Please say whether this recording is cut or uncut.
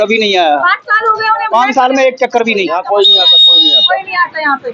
cut